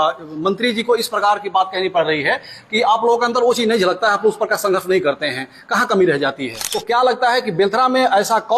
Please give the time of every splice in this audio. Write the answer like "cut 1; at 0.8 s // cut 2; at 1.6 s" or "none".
cut 1; at 6.7 s